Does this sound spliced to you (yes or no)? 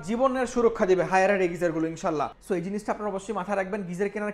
yes